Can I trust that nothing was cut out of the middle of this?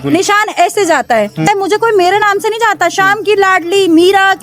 no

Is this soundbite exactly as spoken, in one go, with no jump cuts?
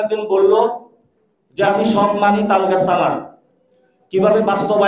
yes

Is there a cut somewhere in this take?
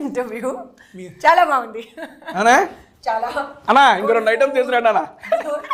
no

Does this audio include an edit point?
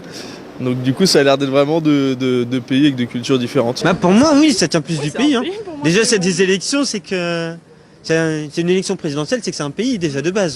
no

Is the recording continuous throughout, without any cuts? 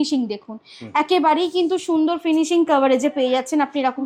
yes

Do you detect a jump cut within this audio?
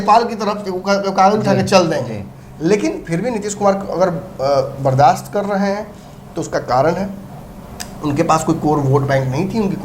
no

